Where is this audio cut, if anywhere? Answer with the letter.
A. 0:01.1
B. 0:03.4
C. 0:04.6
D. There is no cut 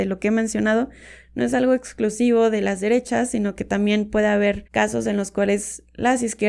C